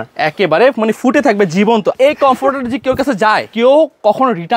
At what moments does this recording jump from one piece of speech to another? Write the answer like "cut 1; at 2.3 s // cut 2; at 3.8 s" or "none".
cut 1; at 2.0 s // cut 2; at 3.5 s